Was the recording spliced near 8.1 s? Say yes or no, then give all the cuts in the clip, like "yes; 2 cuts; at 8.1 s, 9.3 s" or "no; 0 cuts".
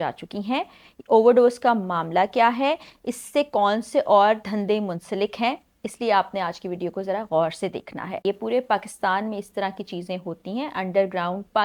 yes; 1 cut; at 8.1 s